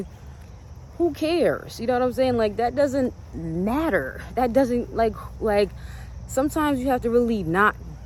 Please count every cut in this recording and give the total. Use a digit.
0